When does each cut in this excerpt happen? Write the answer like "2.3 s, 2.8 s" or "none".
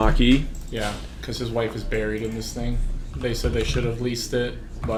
none